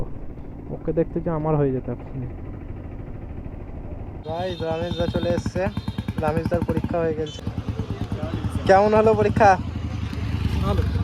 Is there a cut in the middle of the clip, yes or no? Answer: yes